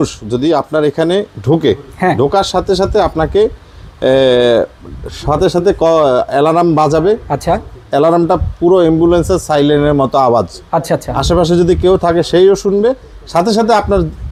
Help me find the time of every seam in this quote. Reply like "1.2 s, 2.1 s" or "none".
none